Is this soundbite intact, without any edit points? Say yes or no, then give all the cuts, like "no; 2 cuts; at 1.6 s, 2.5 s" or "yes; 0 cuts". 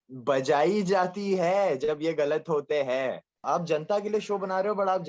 no; 1 cut; at 3.4 s